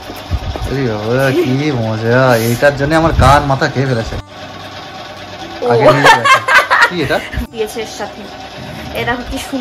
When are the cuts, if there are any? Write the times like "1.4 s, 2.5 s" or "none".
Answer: 4.3 s, 7.5 s